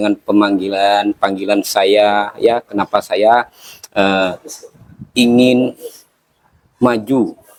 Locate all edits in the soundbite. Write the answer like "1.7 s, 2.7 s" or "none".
none